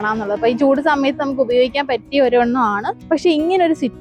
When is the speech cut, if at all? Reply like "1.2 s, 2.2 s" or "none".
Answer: 2.9 s